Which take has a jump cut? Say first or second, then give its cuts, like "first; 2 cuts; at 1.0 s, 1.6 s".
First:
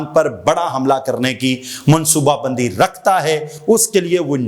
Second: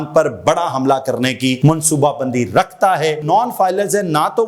second; 2 cuts; at 1.6 s, 3.2 s